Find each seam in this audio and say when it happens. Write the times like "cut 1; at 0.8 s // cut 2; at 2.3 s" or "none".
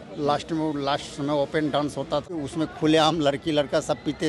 cut 1; at 2.3 s